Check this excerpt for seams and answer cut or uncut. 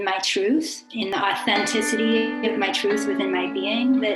cut